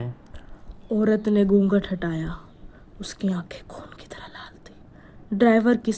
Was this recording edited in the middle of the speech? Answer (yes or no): no